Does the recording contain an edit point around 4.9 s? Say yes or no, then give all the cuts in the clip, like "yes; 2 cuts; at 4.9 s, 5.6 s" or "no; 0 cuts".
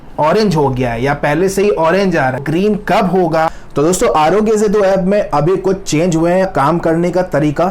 no; 3 cuts; at 2.4 s, 3.6 s, 6.5 s